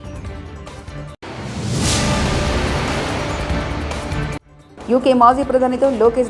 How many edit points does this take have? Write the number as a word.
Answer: two